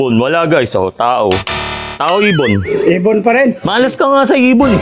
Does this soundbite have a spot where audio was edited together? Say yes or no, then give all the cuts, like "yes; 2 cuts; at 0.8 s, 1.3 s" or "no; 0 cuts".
yes; 2 cuts; at 1.9 s, 3.6 s